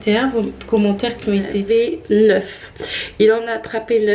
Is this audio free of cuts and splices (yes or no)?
no